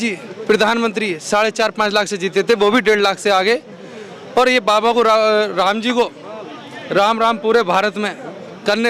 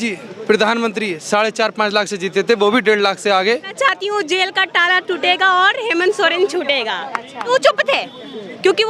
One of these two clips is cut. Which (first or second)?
second